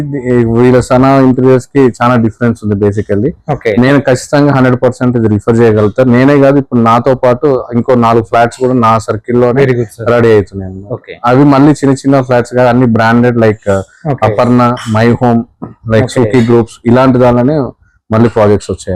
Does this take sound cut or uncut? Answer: uncut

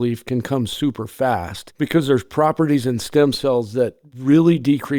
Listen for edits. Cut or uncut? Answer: uncut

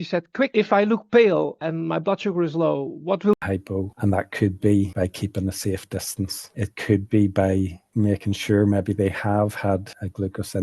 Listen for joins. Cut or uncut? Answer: cut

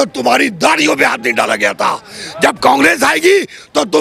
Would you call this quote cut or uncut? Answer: uncut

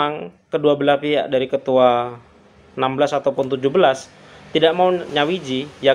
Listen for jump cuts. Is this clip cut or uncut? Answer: cut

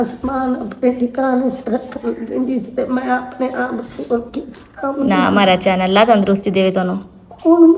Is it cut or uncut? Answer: uncut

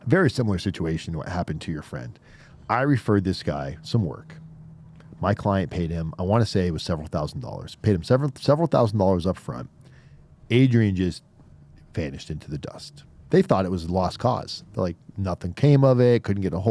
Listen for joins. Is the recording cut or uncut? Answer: uncut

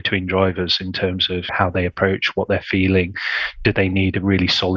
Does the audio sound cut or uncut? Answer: cut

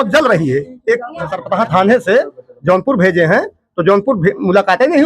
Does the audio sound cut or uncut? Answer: cut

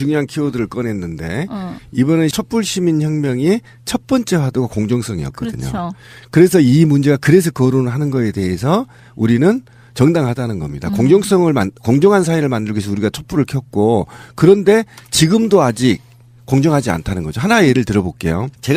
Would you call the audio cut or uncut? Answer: uncut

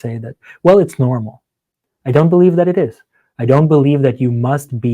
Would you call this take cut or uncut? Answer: uncut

